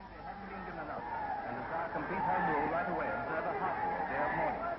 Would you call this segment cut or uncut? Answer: uncut